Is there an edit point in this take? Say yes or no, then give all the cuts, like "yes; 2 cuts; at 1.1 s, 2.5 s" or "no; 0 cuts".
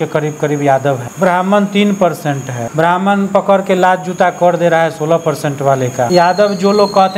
yes; 3 cuts; at 1.1 s, 2.5 s, 6.1 s